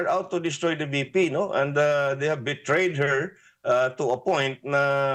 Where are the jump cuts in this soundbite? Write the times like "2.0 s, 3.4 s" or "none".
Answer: none